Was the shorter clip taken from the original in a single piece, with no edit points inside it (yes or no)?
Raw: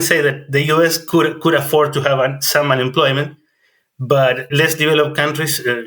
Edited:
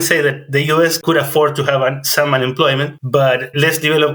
no